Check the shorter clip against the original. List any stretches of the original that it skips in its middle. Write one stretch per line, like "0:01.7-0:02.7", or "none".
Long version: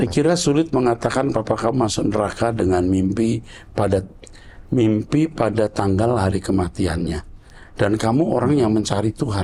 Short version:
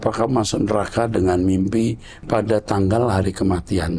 0:03.7-0:05.3

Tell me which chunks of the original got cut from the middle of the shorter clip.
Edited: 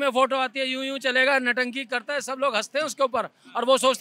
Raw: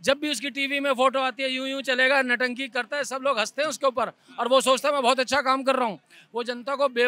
none

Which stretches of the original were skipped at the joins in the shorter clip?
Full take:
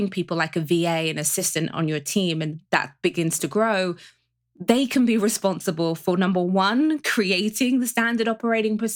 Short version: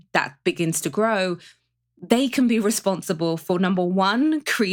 none

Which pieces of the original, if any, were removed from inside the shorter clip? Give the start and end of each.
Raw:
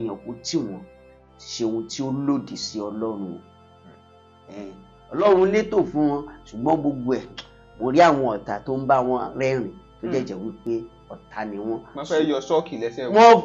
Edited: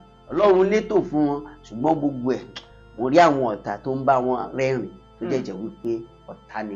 none

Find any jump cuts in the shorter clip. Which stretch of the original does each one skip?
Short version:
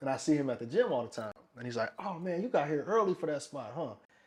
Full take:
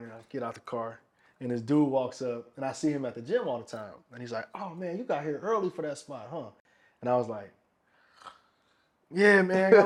none

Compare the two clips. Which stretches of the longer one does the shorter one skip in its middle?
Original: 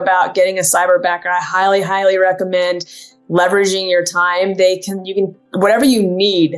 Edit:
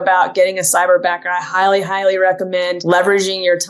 0:02.8-0:03.2

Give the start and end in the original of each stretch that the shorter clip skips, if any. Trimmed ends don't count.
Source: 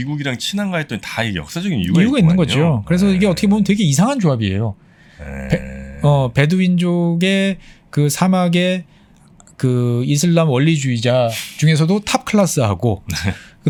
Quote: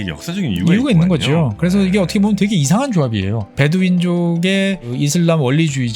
0:04.8-0:06.3
0:07.7-0:10.0

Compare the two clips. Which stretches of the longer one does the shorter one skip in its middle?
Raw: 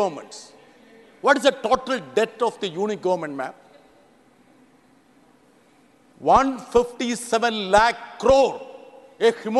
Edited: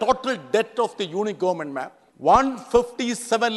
0:03.6-0:06.0

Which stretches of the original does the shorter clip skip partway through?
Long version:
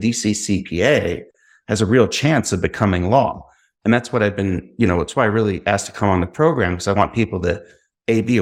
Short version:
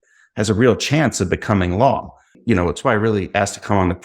0:03.6-0:04.6

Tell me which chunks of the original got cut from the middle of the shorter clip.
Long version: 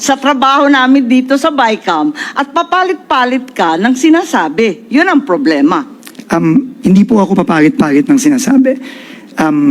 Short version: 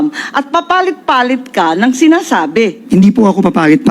0:04.8-0:06.7

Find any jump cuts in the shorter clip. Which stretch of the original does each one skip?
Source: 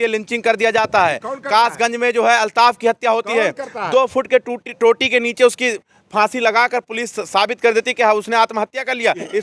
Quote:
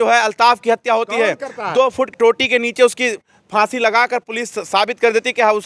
0:04.3-0:04.7

